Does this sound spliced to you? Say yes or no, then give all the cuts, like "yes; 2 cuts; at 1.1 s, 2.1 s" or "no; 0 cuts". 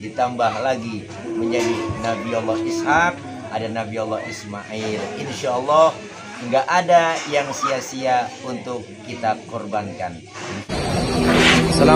yes; 1 cut; at 10.6 s